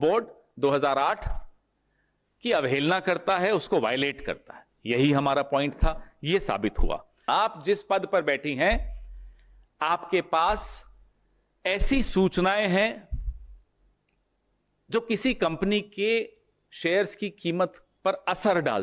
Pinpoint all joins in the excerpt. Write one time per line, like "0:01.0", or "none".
0:07.2